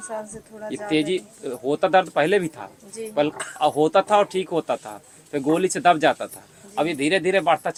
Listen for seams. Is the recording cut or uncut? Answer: uncut